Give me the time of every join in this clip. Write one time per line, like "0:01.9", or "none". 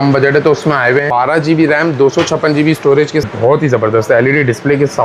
0:01.1
0:03.2